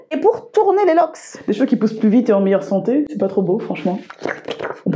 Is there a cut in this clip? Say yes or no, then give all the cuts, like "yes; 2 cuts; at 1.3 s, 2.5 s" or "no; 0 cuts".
yes; 2 cuts; at 1.4 s, 4.0 s